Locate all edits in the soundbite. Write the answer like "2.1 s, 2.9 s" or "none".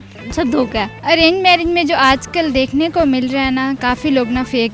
0.9 s